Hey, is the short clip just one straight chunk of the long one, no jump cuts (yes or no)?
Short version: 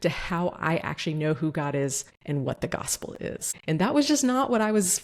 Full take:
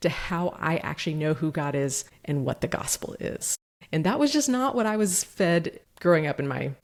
no